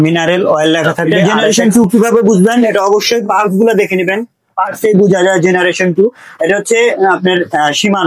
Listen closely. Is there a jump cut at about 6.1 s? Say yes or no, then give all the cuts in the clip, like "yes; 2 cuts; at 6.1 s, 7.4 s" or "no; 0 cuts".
no; 1 cut; at 1.1 s